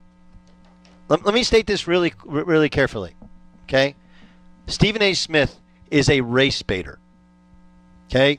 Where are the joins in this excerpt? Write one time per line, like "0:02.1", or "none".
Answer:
none